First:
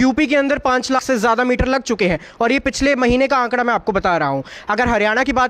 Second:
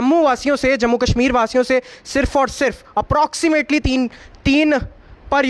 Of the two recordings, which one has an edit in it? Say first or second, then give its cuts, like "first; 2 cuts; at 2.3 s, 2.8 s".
first; 1 cut; at 1.0 s